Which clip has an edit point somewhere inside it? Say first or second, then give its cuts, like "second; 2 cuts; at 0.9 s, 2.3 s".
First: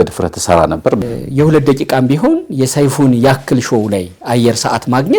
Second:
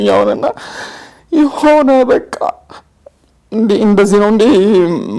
first; 1 cut; at 1.0 s